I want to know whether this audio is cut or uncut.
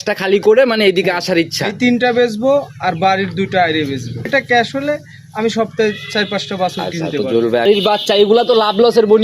cut